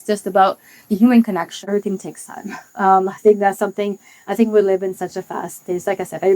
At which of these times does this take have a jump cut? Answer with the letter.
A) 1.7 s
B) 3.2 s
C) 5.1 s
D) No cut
A